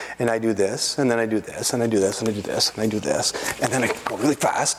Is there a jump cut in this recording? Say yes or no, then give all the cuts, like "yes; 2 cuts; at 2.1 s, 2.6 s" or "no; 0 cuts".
no; 0 cuts